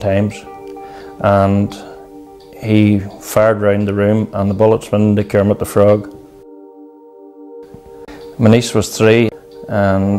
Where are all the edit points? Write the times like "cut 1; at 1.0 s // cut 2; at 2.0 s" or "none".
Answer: cut 1; at 8.1 s // cut 2; at 9.3 s